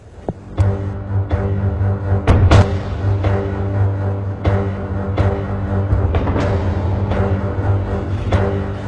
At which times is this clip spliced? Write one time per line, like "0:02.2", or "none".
none